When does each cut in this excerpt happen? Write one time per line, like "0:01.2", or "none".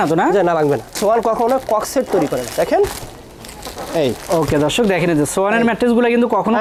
none

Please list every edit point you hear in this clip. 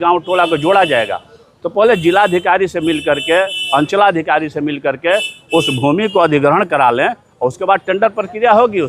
none

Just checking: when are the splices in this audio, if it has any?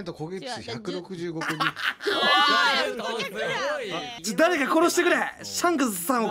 none

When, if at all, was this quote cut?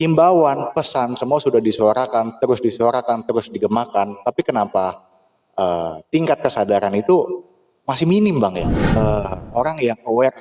0:08.9

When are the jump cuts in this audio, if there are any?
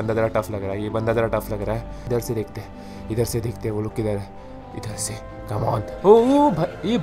0:01.9

